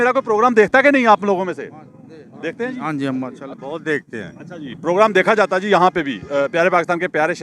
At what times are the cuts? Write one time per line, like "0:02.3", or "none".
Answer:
0:03.5